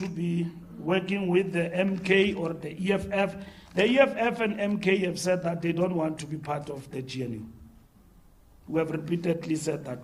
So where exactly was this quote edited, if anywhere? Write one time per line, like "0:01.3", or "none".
none